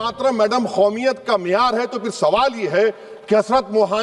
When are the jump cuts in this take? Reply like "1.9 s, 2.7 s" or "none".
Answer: none